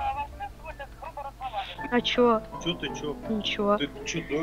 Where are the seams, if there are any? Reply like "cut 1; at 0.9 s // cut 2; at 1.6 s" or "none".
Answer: cut 1; at 1.8 s